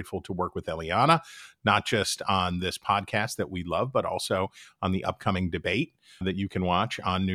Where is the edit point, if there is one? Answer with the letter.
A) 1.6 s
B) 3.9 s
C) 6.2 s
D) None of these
C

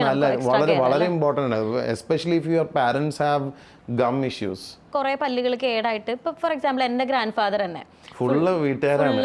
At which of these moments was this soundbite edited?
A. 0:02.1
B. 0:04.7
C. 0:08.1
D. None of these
B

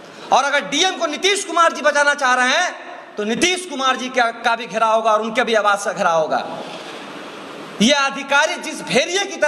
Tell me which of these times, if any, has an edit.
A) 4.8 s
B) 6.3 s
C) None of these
C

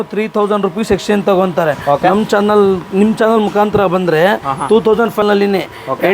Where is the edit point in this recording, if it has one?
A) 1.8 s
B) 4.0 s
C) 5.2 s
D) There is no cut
C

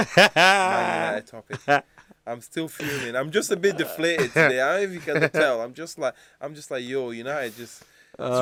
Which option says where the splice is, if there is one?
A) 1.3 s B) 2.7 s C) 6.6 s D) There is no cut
D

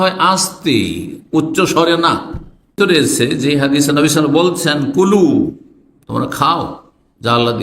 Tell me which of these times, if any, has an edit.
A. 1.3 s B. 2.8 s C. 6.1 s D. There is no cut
B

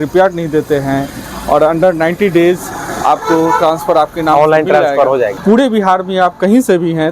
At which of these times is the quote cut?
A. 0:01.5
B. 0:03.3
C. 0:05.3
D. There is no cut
C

